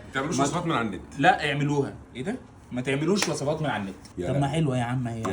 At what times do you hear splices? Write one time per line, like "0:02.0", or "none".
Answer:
0:04.1